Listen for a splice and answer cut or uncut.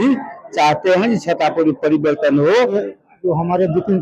cut